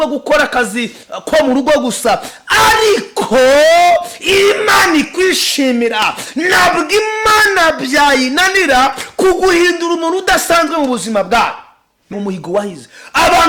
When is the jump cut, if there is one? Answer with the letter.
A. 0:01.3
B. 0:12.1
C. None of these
B